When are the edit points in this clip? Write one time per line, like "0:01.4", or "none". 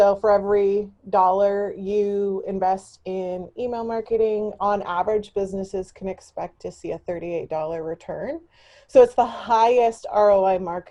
none